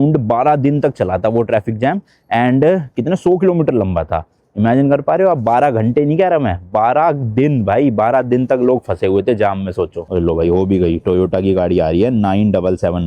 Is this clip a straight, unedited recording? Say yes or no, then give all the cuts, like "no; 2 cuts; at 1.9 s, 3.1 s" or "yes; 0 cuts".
no; 1 cut; at 10.1 s